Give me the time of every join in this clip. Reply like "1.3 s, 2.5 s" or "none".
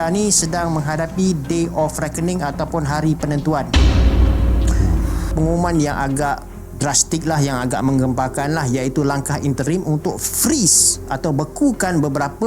5.3 s